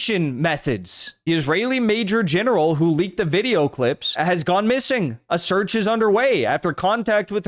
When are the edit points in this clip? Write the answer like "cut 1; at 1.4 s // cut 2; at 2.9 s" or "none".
cut 1; at 1.1 s // cut 2; at 4.1 s